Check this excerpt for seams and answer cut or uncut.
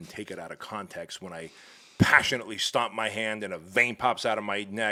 uncut